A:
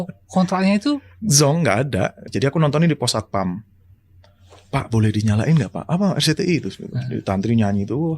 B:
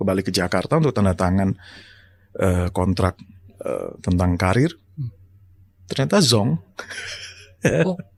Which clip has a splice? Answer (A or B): A